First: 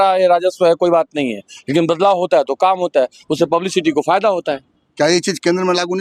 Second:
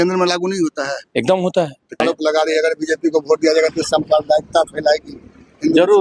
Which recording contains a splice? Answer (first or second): second